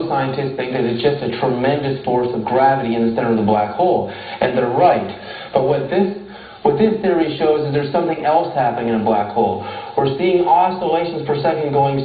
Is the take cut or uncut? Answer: cut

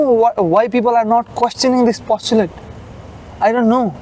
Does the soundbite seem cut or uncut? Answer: uncut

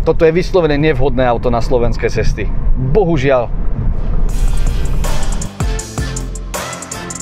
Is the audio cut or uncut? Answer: uncut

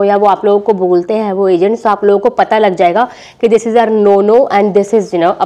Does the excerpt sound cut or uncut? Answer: uncut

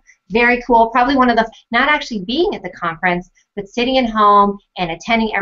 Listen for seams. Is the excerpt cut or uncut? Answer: uncut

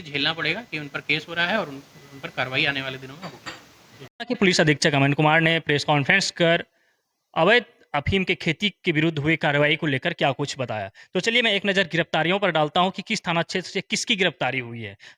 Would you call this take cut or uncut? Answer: uncut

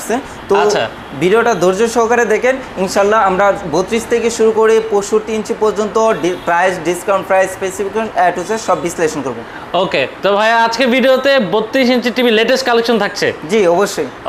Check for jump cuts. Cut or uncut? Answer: uncut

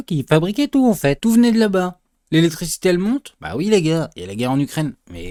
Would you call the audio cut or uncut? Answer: uncut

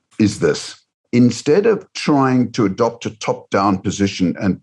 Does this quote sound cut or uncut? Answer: cut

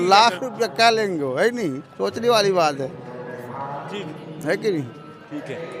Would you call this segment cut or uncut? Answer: uncut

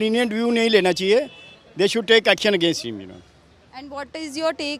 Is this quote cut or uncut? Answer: uncut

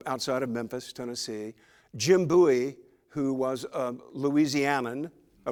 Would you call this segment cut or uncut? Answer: uncut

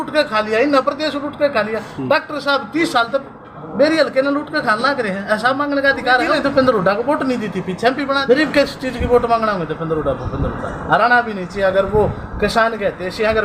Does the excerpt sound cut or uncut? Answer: cut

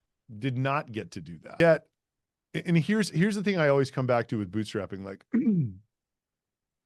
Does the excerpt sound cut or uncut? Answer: cut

